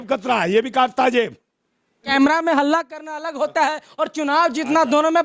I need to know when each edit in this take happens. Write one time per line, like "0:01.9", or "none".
0:02.0

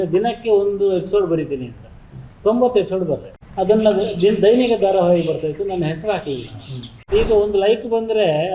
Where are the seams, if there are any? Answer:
0:03.4
0:07.1

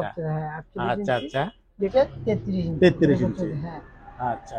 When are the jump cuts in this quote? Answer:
0:01.9

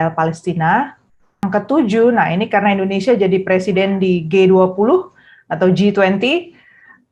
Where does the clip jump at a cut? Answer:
0:01.4

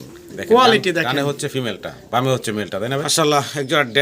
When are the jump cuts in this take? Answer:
0:03.1

